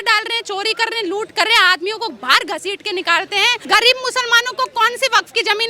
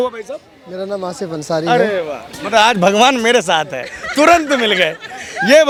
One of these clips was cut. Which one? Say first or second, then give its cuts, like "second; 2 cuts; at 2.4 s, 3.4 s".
first; 1 cut; at 3.6 s